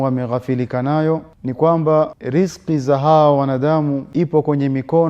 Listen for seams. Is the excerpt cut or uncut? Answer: cut